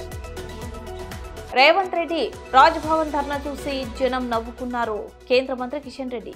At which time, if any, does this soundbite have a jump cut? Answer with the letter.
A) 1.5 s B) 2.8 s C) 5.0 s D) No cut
A